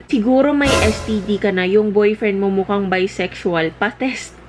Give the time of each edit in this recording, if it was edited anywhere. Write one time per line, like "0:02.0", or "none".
none